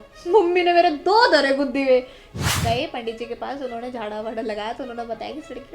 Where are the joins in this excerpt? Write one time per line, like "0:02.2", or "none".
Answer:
0:02.2

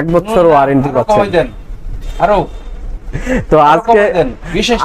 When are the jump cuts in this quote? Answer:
none

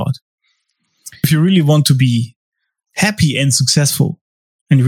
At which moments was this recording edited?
0:01.2

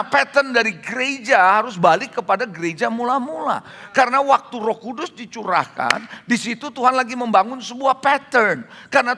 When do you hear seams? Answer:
none

